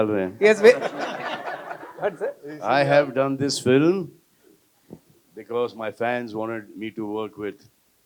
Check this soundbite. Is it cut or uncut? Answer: uncut